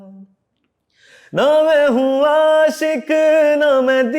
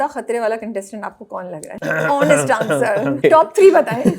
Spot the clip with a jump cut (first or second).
second